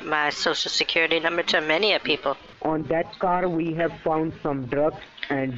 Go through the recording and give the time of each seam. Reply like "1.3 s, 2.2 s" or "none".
2.5 s